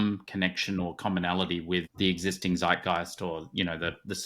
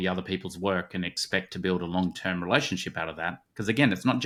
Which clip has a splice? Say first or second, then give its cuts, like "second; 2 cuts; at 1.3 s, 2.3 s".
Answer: first; 1 cut; at 1.9 s